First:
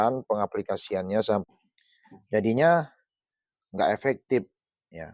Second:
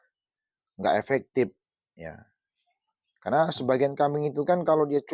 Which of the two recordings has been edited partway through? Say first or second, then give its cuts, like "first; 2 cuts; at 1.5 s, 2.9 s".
first; 1 cut; at 1.4 s